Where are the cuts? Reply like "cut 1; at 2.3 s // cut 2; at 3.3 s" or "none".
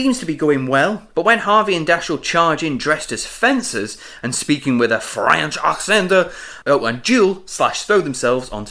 cut 1; at 1.0 s